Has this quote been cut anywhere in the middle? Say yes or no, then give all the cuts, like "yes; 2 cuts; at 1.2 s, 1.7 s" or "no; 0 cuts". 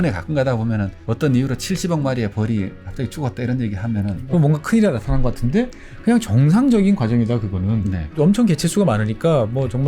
yes; 2 cuts; at 4.2 s, 8.2 s